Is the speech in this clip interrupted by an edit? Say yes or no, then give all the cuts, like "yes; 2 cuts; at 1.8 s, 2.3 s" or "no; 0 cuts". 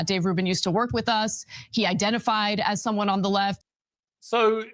yes; 1 cut; at 3.6 s